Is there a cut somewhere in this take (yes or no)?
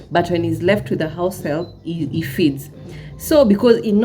no